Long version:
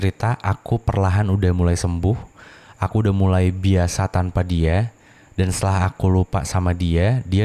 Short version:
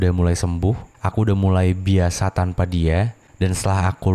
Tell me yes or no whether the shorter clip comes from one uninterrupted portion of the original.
no